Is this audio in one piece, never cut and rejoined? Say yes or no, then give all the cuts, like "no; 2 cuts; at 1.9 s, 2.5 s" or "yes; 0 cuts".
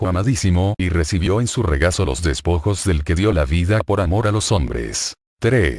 no; 1 cut; at 4.4 s